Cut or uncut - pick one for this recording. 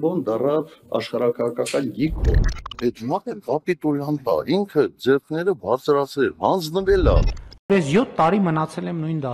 uncut